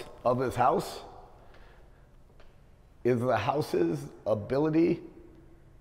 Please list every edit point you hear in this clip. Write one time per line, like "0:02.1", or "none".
none